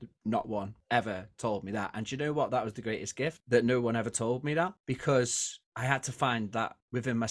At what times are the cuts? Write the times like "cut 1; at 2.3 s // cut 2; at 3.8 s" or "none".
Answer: none